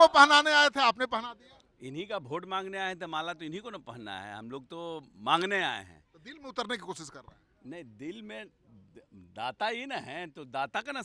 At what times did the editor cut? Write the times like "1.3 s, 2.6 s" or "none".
none